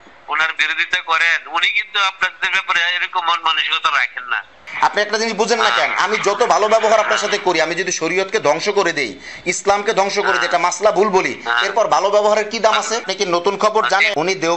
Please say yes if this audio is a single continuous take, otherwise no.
no